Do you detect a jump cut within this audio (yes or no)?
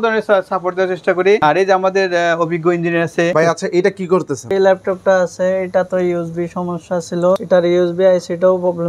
yes